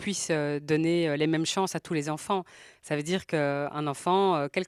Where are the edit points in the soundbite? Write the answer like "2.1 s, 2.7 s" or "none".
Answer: none